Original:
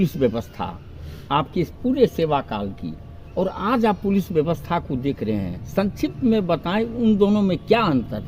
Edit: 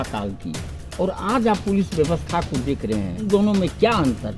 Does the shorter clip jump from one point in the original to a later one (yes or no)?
yes